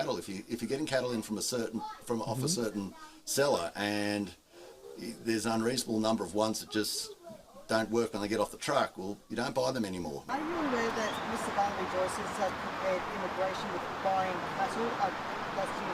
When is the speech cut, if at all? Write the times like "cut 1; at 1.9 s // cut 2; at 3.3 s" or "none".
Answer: cut 1; at 10.2 s